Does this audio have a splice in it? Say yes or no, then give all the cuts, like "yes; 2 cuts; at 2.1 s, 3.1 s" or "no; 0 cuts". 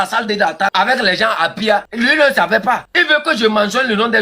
yes; 3 cuts; at 0.7 s, 1.9 s, 2.9 s